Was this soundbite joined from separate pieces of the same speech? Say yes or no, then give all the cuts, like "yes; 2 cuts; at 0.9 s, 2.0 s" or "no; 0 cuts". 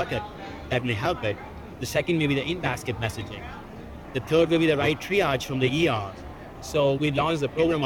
no; 0 cuts